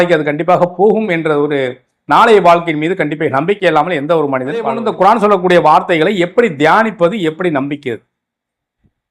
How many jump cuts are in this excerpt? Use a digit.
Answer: 1